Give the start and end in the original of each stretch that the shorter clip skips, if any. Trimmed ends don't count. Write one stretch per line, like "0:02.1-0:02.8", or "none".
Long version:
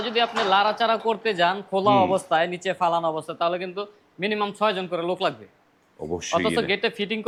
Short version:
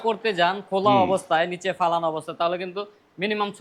none